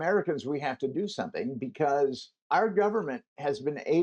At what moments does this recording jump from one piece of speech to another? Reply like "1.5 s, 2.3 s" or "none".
2.3 s